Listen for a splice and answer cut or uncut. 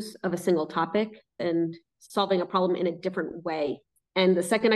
cut